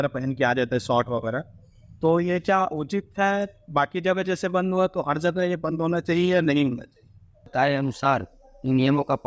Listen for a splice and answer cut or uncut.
cut